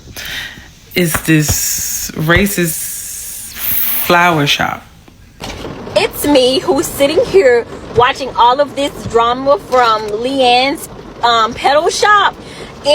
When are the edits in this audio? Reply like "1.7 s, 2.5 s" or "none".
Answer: 2.7 s, 5.4 s

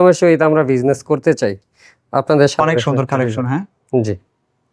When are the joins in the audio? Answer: 2.6 s

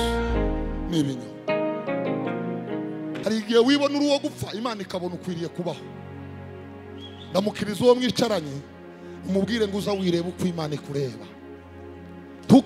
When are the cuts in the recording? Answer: 3.2 s

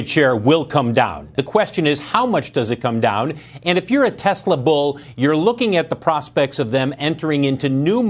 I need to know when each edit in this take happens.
1.2 s

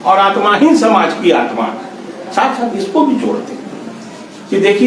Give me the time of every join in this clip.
none

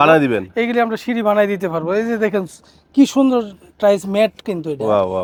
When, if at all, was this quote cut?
none

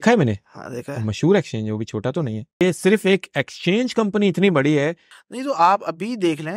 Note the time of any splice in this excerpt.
2.6 s, 5.1 s

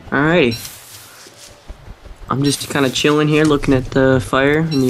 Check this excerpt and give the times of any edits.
3.4 s

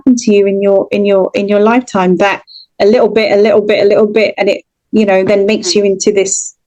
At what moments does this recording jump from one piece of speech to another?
none

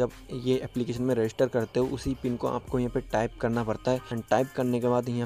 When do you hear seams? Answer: 4.1 s

